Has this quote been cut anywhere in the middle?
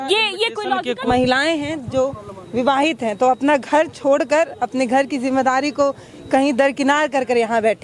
yes; 1 cut; at 0.9 s

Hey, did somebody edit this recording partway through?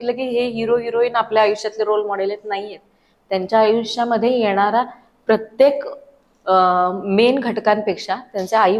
no; 0 cuts

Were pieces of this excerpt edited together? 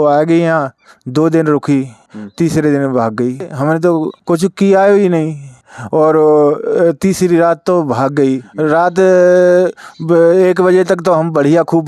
yes; 2 cuts; at 3.5 s, 8.5 s

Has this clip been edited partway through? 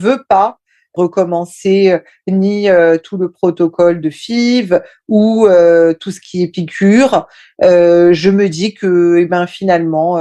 yes; 1 cut; at 0.9 s

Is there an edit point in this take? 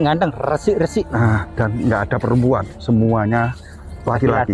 no; 0 cuts

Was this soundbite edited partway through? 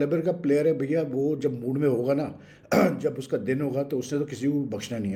no; 0 cuts

